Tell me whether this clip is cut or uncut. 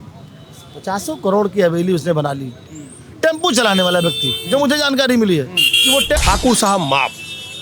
cut